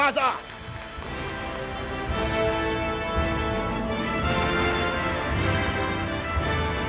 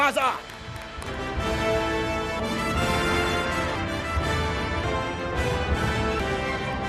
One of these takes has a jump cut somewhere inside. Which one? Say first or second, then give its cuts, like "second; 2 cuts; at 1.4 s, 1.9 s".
second; 5 cuts; at 1.1 s, 2.4 s, 3.8 s, 4.8 s, 6.2 s